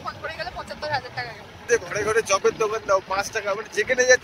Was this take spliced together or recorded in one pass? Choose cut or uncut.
cut